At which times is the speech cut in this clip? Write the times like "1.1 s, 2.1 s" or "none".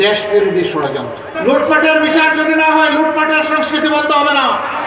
1.2 s